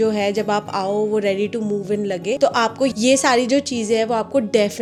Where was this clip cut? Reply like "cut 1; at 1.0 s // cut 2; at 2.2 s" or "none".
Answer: none